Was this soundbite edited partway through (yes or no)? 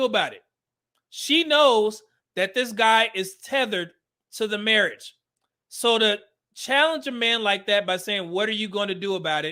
no